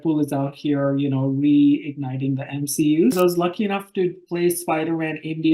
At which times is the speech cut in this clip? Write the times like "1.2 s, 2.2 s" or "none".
3.2 s